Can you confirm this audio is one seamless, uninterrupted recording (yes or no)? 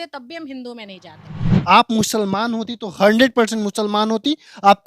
no